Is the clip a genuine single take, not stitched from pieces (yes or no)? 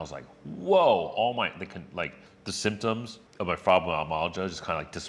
yes